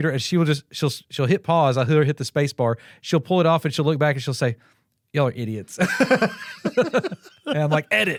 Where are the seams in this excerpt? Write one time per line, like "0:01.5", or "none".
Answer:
none